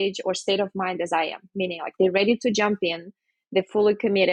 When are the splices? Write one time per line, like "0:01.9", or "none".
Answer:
none